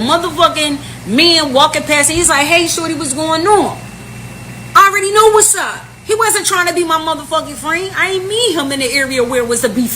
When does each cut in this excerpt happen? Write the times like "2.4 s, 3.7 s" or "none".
2.6 s